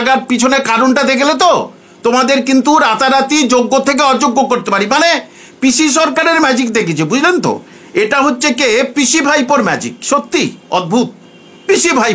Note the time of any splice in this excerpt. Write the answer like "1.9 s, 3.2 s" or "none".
none